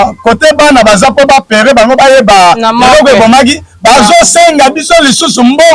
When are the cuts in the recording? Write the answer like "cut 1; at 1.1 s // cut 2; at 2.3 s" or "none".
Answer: none